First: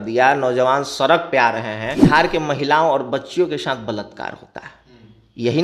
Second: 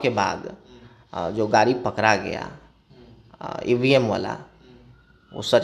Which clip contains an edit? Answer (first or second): first